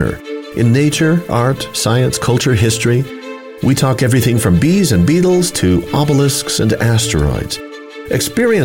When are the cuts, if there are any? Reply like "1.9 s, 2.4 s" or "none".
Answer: none